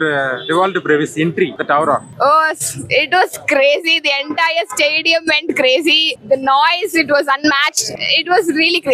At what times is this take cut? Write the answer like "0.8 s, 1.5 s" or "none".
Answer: 1.8 s, 6.1 s, 7.9 s